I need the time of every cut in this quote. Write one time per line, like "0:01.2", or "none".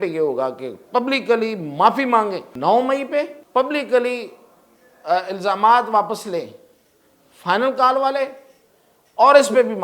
0:02.5
0:03.4